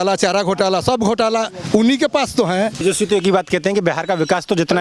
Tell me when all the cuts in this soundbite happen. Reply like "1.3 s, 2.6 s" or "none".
2.8 s